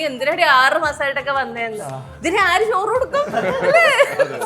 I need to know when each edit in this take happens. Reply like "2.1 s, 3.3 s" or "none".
none